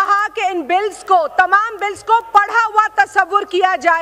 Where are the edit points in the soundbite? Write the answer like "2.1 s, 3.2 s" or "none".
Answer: none